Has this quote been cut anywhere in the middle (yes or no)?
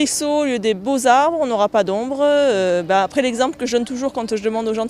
no